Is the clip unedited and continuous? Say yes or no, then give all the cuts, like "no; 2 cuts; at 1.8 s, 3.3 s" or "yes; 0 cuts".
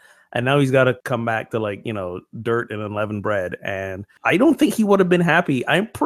no; 2 cuts; at 1.0 s, 4.1 s